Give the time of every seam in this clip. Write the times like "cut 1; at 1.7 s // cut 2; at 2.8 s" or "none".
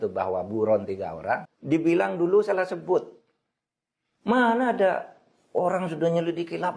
cut 1; at 1.5 s